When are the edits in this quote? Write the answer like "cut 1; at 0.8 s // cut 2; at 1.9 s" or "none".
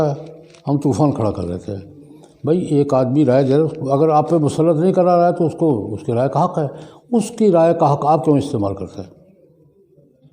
none